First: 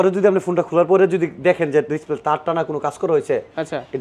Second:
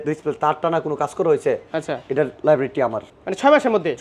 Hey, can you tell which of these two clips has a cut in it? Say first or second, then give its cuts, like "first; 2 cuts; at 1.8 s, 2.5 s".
second; 1 cut; at 3.1 s